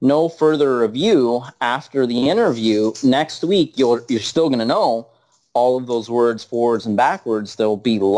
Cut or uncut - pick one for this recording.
uncut